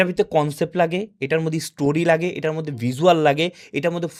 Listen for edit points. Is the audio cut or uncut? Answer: uncut